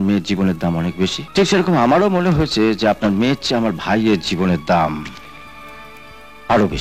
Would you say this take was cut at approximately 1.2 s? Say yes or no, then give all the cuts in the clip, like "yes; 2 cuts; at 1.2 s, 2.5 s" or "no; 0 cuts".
yes; 1 cut; at 1.2 s